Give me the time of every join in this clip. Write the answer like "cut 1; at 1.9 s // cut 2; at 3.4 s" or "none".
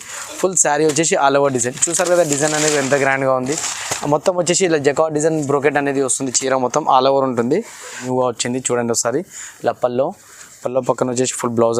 cut 1; at 8.0 s

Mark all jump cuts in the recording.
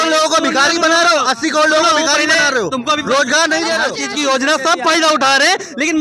cut 1; at 4.0 s

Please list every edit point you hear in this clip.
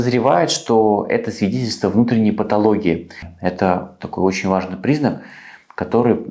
cut 1; at 3.3 s

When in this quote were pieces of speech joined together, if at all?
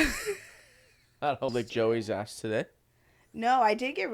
cut 1; at 1.5 s

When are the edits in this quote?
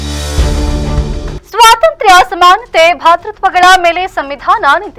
cut 1; at 1.3 s

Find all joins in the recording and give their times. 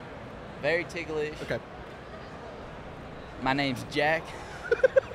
none

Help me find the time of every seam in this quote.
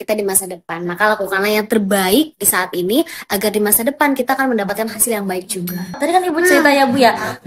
cut 1; at 6.0 s

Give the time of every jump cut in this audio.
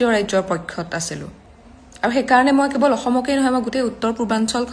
none

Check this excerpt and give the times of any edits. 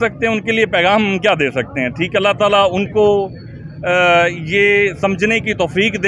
none

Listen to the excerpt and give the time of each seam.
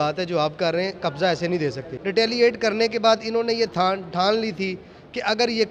cut 1; at 1.9 s

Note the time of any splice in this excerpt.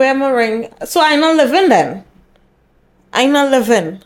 none

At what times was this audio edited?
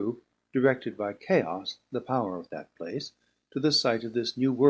cut 1; at 3.5 s

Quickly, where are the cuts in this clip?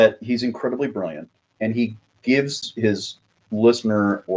cut 1; at 2.7 s

